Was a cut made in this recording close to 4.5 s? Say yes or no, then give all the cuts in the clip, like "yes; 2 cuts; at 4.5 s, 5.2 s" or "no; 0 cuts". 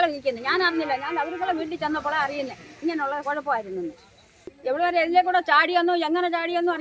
yes; 1 cut; at 4.5 s